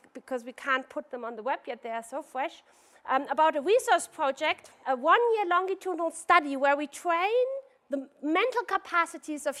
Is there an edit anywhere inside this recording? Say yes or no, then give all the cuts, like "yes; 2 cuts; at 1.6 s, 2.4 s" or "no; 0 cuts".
no; 0 cuts